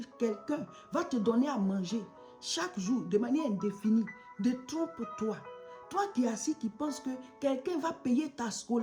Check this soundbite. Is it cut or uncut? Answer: uncut